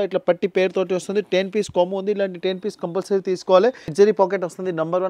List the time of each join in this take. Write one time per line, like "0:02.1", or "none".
0:03.9